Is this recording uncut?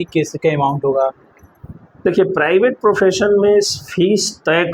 yes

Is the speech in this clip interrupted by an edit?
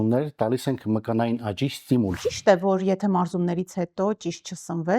yes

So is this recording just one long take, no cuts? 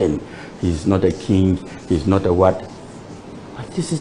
yes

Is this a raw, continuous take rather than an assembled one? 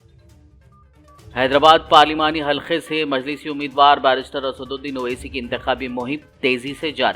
no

